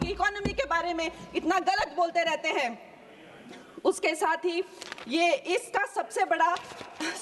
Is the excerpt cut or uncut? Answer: uncut